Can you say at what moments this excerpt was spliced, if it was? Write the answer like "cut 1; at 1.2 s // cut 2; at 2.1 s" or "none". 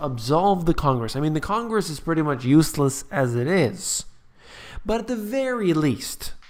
none